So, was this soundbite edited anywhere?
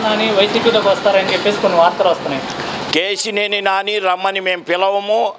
no; 0 cuts

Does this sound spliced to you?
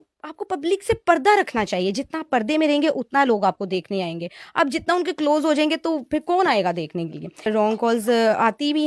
yes; 1 cut; at 7.5 s

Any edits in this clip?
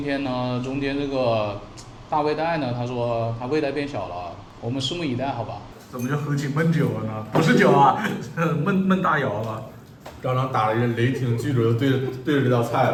no; 0 cuts

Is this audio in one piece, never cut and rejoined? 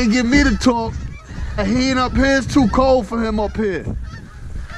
no; 1 cut; at 1.6 s

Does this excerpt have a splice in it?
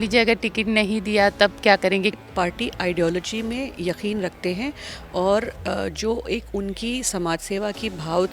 yes; 1 cut; at 2.2 s

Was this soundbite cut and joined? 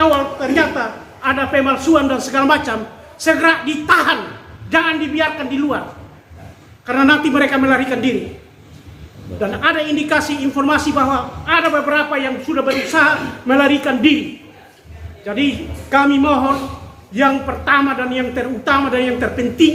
no; 0 cuts

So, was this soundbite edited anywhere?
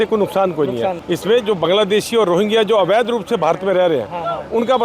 yes; 1 cut; at 1.0 s

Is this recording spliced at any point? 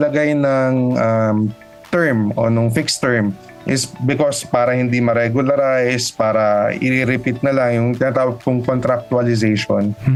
no; 0 cuts

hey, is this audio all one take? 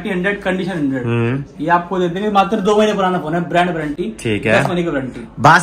yes; 0 cuts

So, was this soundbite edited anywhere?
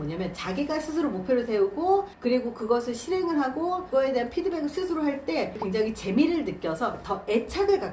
yes; 2 cuts; at 3.9 s, 5.6 s

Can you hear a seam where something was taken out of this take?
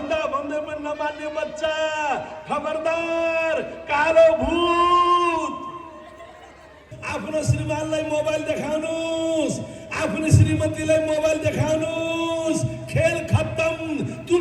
yes; 1 cut; at 6.9 s

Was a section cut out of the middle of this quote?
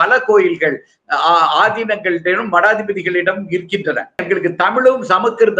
yes; 1 cut; at 4.2 s

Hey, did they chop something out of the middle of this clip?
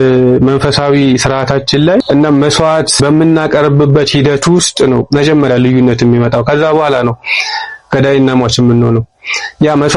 yes; 2 cuts; at 2.0 s, 3.0 s

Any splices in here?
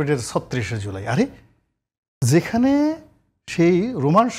no; 0 cuts

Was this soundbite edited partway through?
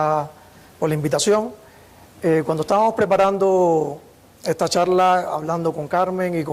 no; 0 cuts

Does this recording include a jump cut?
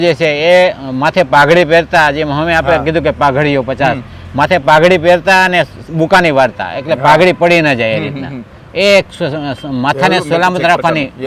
no; 0 cuts

